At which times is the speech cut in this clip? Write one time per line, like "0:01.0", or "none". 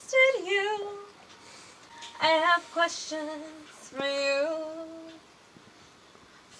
0:01.9